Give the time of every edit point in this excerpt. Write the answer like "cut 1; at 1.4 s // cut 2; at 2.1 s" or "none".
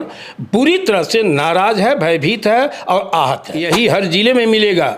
cut 1; at 3.5 s